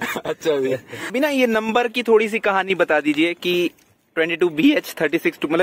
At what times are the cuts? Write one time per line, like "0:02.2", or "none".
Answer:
0:01.0

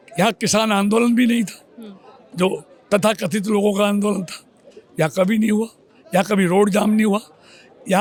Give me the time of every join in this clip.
none

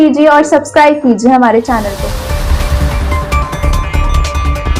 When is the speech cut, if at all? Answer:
none

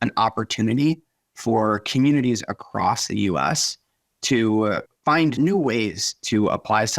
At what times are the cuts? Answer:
0:05.3

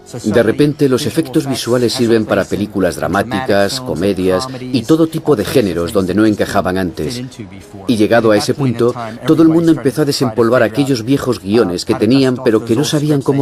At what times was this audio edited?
0:07.6

